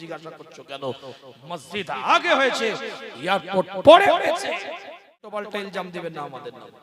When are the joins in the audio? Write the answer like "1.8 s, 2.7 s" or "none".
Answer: 5.3 s